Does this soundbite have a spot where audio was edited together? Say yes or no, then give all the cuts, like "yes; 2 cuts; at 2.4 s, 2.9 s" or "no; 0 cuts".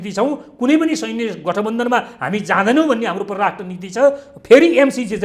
no; 0 cuts